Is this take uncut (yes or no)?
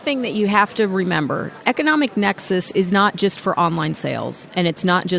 no